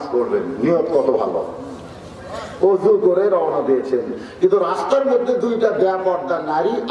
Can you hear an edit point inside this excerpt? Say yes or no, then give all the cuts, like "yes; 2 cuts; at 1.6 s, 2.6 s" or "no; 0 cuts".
no; 0 cuts